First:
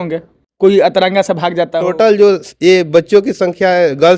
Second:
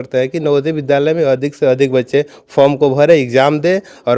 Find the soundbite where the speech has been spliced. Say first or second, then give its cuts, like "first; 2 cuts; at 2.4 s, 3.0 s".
first; 1 cut; at 1.9 s